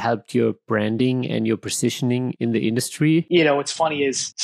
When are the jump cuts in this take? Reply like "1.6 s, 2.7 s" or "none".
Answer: 3.2 s